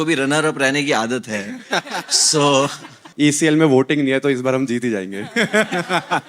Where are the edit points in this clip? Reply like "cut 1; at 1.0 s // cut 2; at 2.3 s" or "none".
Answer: cut 1; at 3.1 s